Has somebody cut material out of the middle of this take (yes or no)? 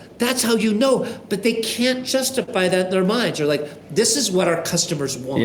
no